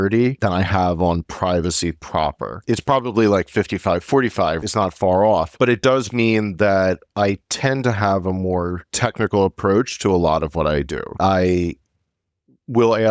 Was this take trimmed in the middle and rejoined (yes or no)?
yes